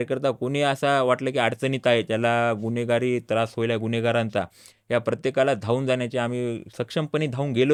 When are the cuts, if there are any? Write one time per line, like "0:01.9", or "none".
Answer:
none